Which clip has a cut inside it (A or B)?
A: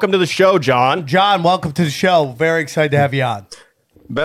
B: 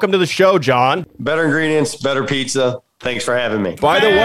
B